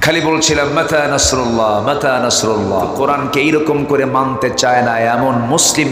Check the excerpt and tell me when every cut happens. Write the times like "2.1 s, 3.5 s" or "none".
2.9 s